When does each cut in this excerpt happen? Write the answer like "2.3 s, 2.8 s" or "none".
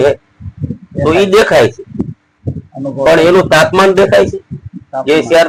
none